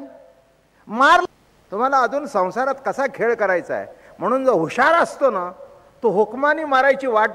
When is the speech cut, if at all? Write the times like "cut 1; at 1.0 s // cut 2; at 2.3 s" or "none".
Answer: cut 1; at 1.2 s